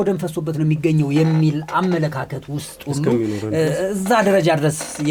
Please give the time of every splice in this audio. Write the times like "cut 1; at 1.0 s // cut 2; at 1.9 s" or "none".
none